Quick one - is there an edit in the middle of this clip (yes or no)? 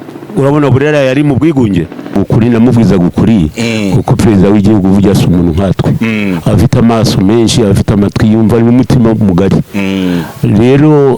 yes